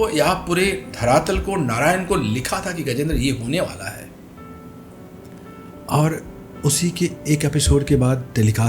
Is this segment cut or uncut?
cut